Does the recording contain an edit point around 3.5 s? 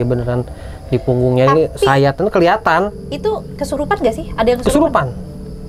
yes; 1 cut; at 3.5 s

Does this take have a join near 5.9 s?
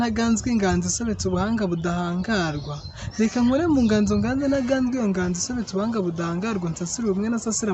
no; 0 cuts

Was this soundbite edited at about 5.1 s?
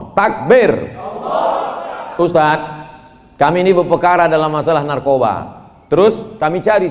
no; 1 cut; at 1.9 s

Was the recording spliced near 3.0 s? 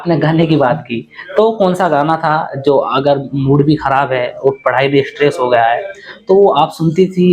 no; 0 cuts

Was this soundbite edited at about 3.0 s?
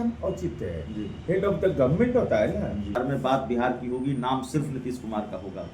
yes; 1 cut; at 3.0 s

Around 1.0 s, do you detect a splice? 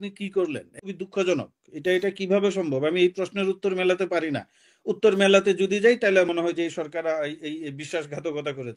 yes; 1 cut; at 1.0 s

